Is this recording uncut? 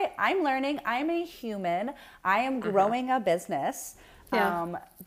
yes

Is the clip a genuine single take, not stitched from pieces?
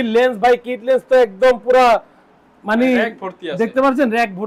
yes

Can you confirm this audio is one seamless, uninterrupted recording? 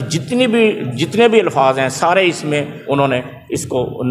yes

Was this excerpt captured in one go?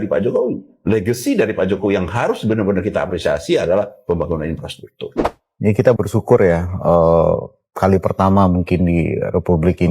no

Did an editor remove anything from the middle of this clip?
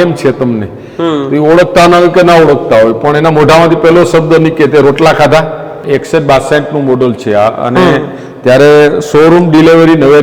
yes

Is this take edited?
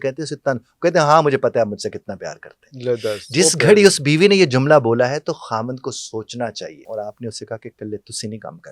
yes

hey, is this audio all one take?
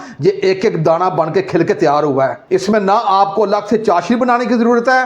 no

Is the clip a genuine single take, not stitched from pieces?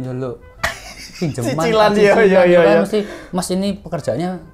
yes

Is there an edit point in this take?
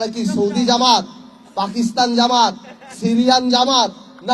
no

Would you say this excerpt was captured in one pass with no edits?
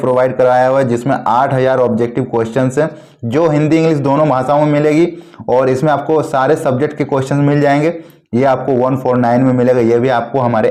yes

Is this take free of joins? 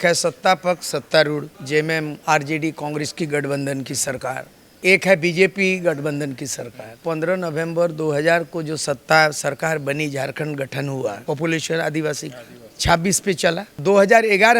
no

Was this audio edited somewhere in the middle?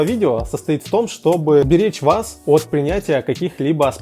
yes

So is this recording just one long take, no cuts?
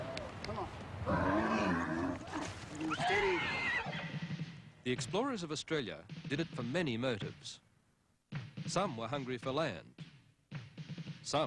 yes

